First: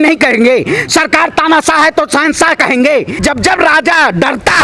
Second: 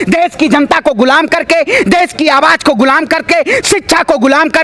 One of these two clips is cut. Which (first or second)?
first